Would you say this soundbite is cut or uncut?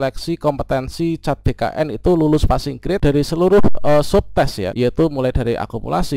cut